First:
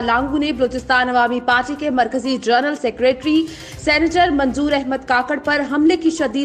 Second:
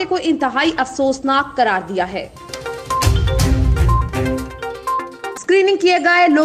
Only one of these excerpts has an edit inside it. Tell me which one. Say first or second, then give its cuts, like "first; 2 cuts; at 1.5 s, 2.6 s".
second; 2 cuts; at 2.4 s, 5.3 s